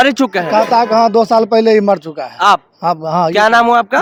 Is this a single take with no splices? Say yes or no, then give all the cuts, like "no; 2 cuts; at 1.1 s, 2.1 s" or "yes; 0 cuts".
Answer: yes; 0 cuts